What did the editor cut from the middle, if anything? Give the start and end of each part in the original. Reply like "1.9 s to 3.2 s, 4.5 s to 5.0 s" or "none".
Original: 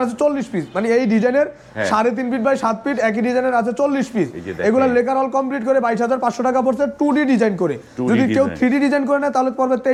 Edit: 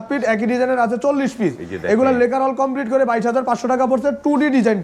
none